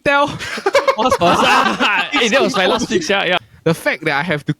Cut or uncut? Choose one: cut